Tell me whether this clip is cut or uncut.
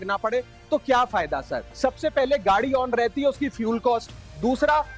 cut